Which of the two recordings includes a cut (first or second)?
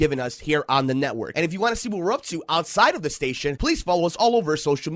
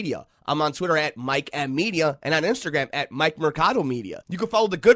first